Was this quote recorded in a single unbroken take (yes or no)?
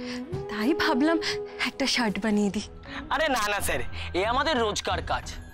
no